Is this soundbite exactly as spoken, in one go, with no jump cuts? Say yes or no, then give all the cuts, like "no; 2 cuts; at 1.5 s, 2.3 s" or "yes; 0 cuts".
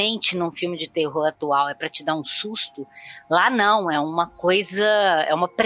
yes; 0 cuts